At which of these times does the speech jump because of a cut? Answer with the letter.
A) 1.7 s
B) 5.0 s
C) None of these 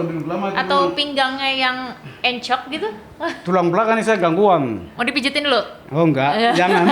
B